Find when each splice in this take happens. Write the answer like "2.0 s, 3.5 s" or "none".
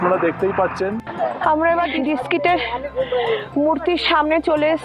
1.1 s